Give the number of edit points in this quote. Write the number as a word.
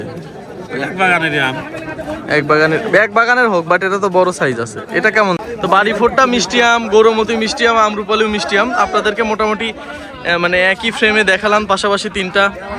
one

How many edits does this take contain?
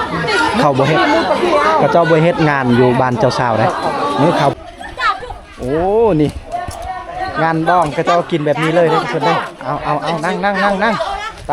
one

